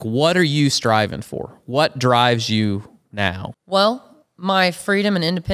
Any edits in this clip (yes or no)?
yes